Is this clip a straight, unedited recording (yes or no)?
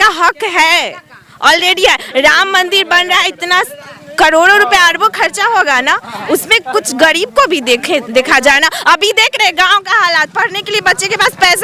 yes